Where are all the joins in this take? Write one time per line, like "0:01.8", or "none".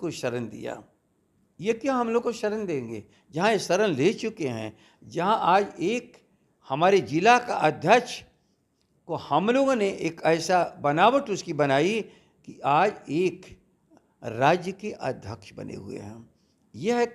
none